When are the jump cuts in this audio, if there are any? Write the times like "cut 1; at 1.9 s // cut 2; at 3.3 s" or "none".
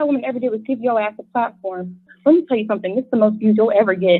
cut 1; at 2.1 s